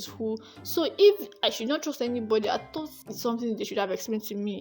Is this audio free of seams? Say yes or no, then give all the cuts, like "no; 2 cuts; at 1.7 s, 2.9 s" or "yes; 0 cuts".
yes; 0 cuts